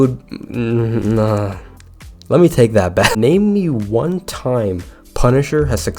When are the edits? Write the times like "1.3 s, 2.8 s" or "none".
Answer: 3.2 s